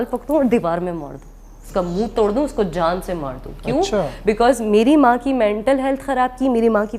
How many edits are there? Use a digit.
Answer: 0